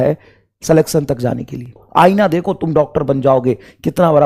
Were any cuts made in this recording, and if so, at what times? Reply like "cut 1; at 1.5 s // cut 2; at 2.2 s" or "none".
cut 1; at 1.8 s